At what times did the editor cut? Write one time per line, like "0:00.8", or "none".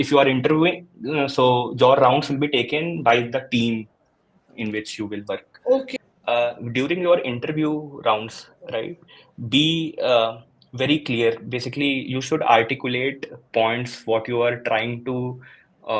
0:05.9